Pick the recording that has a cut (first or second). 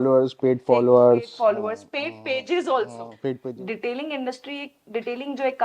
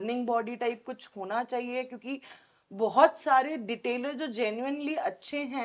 first